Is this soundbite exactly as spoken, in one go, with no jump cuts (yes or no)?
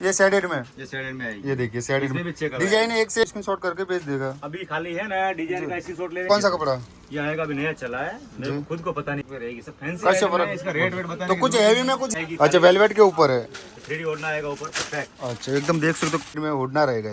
no